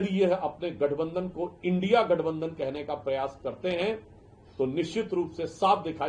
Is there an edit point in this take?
no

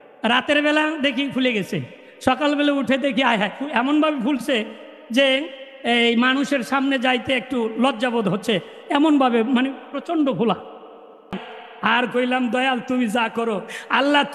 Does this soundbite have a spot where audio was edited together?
yes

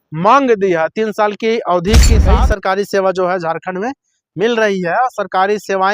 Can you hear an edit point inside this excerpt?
yes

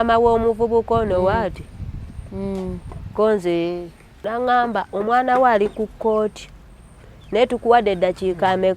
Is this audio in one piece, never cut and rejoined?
no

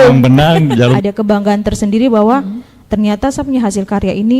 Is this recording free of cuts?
no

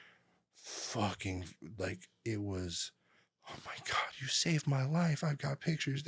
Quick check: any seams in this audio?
no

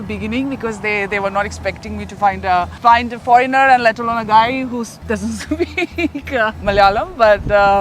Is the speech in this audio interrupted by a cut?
yes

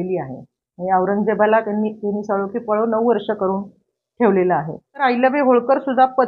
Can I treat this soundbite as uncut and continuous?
no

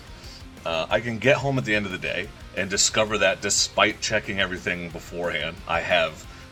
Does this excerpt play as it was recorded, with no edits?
yes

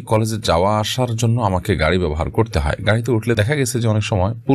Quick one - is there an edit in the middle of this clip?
yes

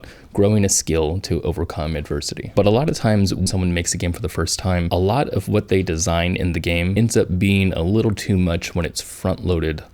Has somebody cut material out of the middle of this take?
yes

